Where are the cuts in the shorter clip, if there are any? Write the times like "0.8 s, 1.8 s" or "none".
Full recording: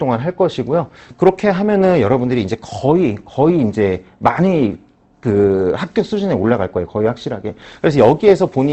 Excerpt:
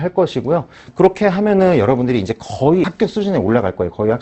2.9 s